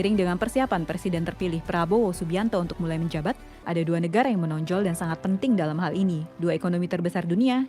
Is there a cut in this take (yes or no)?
yes